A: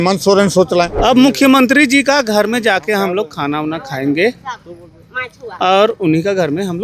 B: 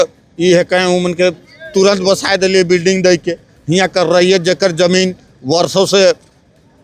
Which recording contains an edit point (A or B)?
A